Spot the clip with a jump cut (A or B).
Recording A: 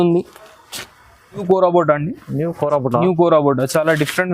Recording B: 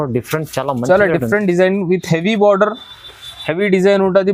A